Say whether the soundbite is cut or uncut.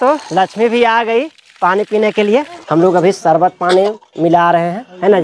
cut